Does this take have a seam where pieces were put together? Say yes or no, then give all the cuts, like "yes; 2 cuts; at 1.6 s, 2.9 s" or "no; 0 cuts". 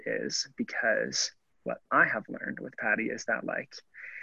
no; 0 cuts